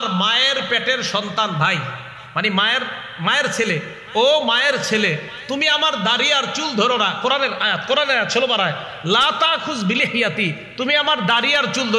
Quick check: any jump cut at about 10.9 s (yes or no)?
no